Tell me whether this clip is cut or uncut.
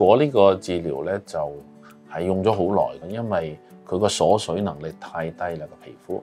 uncut